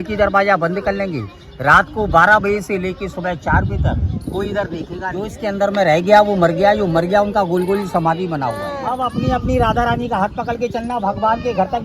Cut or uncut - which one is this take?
cut